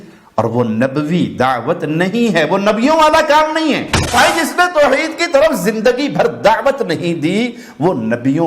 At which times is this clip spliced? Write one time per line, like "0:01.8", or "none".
0:04.1